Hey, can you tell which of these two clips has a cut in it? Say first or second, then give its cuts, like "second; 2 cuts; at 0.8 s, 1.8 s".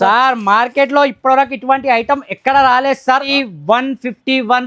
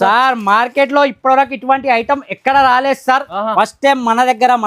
first; 1 cut; at 3.3 s